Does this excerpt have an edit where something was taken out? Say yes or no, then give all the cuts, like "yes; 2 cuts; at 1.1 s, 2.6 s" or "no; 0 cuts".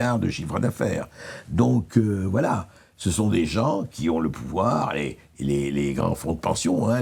no; 0 cuts